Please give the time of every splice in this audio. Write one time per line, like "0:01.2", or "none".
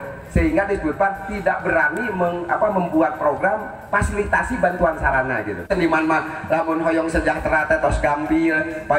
0:05.7

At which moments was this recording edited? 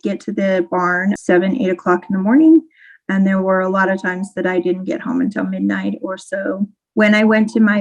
0:01.2
0:06.8

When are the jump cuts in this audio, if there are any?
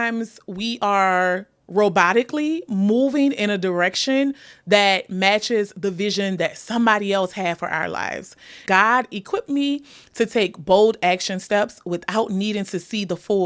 0:08.8

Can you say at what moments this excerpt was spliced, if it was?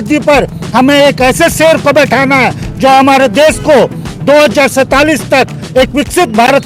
none

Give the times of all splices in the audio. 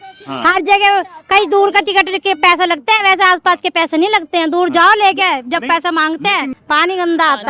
0:06.5

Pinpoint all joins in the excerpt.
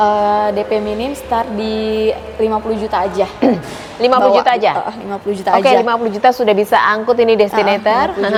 none

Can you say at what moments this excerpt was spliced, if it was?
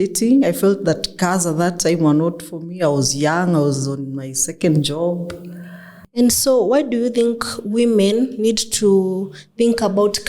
0:06.0

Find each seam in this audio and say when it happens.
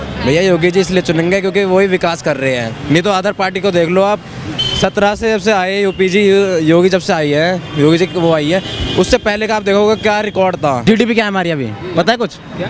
0:10.8

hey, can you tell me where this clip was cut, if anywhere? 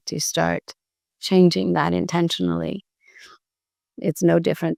none

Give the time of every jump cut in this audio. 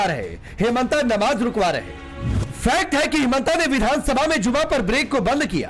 0:01.3
0:02.5

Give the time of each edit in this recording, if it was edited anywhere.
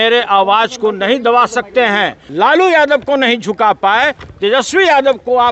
0:02.2

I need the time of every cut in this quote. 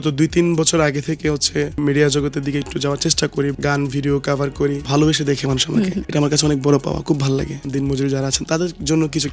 0:01.8
0:03.5
0:04.8
0:06.0
0:07.6

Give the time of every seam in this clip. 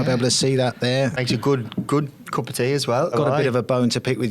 0:01.2
0:03.1

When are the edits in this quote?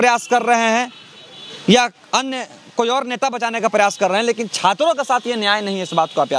none

